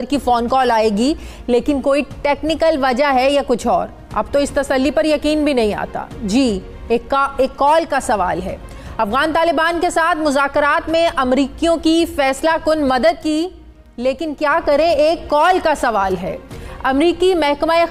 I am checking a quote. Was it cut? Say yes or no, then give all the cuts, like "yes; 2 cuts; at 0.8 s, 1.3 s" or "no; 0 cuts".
no; 0 cuts